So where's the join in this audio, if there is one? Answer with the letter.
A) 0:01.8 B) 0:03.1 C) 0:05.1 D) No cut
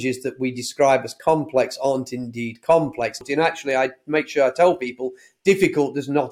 B